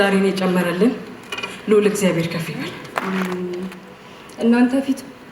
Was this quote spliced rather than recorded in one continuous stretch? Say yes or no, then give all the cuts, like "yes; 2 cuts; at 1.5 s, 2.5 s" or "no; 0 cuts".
yes; 1 cut; at 2.9 s